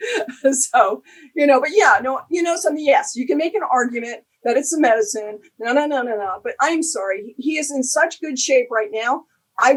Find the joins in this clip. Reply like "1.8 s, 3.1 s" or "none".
none